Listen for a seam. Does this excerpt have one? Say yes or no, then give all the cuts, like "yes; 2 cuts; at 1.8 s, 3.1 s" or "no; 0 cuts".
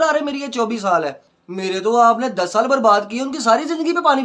yes; 1 cut; at 1.3 s